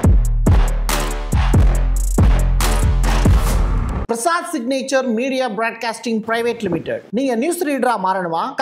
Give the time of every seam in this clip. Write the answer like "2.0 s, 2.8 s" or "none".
4.0 s